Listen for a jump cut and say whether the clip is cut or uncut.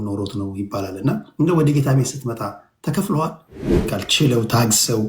cut